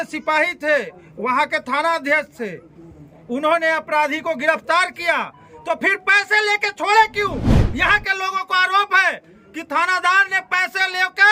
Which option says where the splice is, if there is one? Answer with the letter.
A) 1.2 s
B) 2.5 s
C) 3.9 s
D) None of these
D